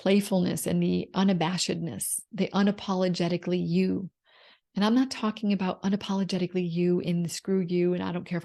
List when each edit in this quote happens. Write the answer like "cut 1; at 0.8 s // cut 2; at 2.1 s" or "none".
none